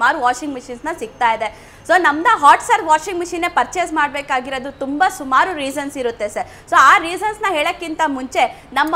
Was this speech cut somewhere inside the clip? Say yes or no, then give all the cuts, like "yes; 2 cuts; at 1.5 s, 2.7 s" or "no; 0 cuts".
no; 0 cuts